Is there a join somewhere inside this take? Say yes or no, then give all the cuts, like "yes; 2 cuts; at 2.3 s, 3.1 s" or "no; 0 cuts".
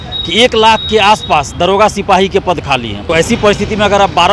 yes; 1 cut; at 3.0 s